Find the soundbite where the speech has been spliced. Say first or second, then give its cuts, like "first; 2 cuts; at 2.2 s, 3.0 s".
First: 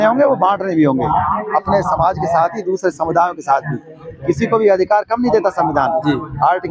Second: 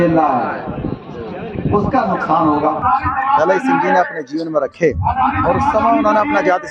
second; 1 cut; at 2.8 s